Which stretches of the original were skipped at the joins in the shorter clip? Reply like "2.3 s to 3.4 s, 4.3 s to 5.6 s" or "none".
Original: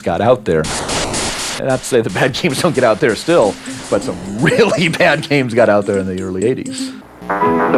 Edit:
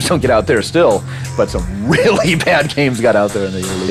none